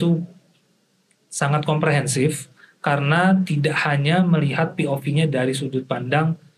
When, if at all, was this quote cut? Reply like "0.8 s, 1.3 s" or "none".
none